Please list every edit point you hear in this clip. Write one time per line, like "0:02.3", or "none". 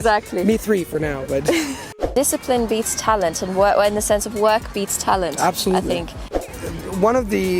0:01.9
0:06.3